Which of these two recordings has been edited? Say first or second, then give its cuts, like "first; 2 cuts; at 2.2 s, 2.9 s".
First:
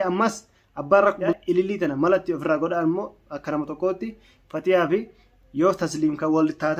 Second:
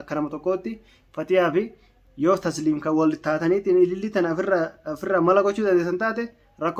first; 1 cut; at 1.4 s